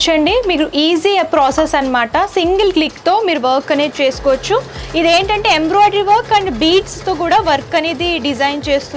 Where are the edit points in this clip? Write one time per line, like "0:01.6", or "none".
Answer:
none